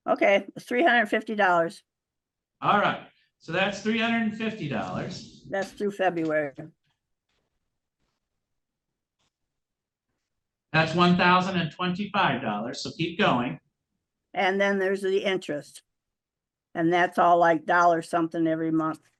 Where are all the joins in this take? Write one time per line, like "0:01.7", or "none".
none